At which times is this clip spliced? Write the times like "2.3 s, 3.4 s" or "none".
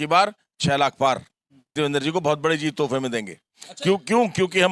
1.7 s